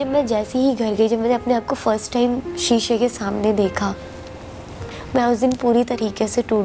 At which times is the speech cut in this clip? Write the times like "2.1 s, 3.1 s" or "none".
4.5 s